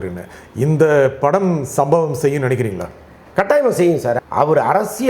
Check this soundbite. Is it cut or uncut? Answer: cut